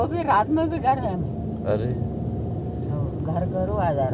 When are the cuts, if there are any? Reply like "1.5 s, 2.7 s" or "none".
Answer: none